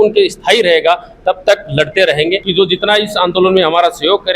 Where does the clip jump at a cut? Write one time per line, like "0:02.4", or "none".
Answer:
0:02.5